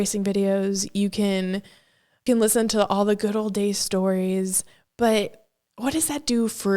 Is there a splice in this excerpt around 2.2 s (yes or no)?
yes